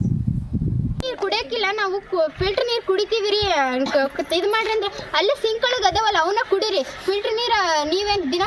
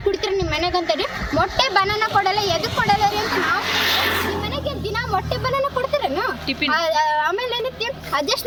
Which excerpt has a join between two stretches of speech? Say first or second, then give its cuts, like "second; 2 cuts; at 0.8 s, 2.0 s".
first; 1 cut; at 1.0 s